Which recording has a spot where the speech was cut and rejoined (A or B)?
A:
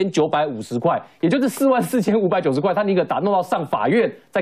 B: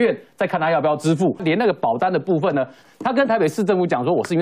B